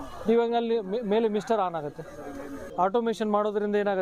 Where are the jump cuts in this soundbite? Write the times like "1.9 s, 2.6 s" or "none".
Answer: 2.6 s